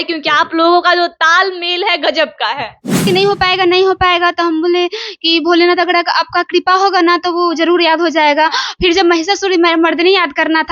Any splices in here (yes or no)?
yes